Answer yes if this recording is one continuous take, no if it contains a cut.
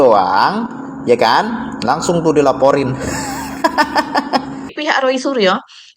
no